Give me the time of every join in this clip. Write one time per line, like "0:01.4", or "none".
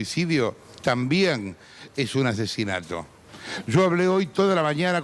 0:03.4